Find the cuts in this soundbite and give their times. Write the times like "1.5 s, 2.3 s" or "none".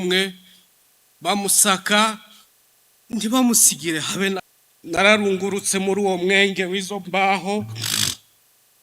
4.6 s